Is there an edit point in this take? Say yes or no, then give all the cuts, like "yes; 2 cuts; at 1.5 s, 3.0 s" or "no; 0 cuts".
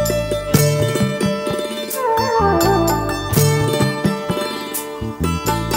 no; 0 cuts